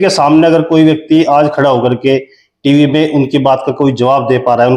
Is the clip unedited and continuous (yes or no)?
yes